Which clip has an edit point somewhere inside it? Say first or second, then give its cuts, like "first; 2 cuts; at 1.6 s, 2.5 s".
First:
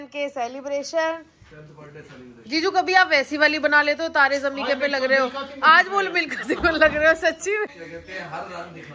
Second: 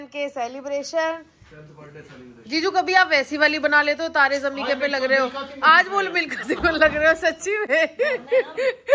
first; 1 cut; at 7.6 s